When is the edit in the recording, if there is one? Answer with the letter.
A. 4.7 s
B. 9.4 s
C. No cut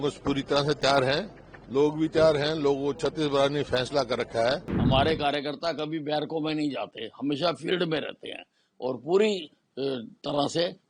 A